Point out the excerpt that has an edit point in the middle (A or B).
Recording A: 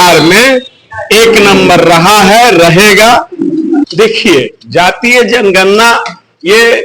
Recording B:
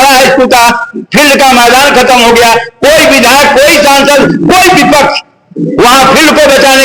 A